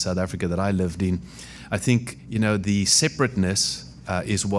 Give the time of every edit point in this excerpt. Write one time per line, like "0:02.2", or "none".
none